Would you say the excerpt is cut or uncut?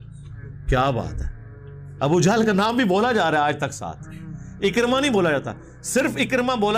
uncut